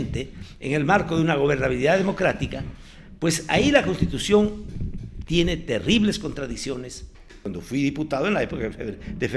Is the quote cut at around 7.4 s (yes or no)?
yes